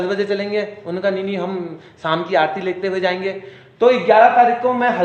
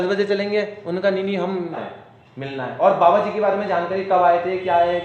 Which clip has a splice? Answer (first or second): second